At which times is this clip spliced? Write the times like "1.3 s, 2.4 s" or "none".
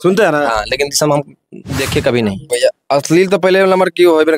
2.5 s